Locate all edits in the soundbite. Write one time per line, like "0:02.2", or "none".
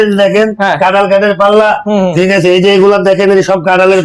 none